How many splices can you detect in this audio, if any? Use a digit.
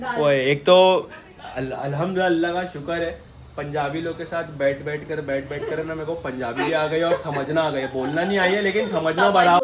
0